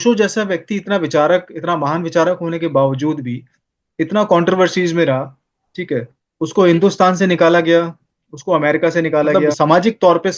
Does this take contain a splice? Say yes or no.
yes